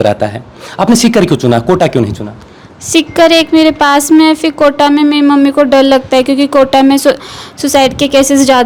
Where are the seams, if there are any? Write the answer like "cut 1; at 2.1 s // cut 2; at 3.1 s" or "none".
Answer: none